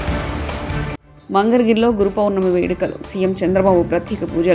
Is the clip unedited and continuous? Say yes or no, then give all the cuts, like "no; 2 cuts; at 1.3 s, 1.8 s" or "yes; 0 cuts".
yes; 0 cuts